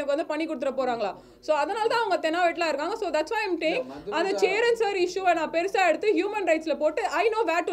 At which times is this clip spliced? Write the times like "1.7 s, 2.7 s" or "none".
none